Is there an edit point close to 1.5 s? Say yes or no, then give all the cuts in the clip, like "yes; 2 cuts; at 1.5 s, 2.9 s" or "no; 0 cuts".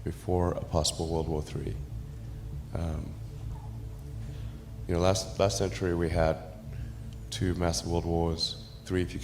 no; 2 cuts; at 3.4 s, 4.9 s